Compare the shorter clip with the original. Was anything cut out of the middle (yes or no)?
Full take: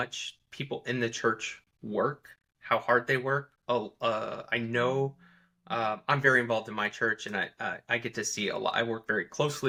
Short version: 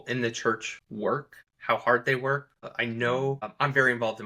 yes